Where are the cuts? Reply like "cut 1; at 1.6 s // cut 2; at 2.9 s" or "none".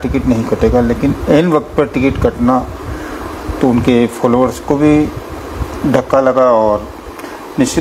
none